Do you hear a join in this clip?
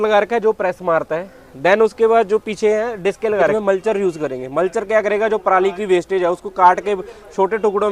yes; 1 cut; at 3.6 s

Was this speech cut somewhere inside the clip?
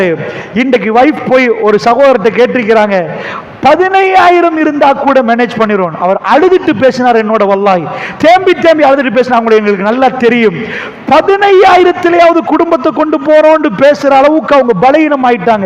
yes; 1 cut; at 8.0 s

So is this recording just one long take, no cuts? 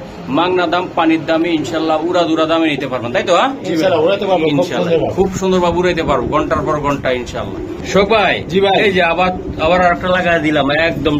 yes; 0 cuts

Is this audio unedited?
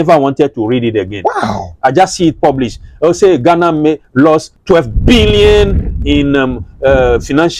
no; 1 cut; at 4.2 s

